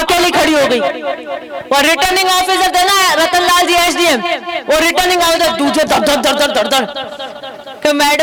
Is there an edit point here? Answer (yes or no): no